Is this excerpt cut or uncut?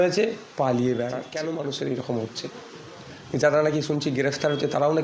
cut